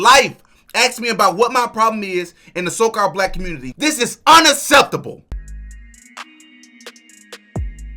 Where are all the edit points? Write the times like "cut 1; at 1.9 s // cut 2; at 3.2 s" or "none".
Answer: cut 1; at 3.7 s // cut 2; at 5.5 s